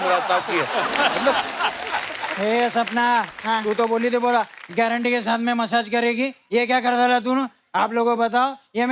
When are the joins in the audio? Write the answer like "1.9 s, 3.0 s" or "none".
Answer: 2.2 s